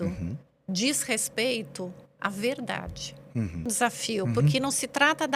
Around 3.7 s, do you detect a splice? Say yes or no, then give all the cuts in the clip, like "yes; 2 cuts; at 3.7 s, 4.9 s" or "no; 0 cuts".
yes; 1 cut; at 3.7 s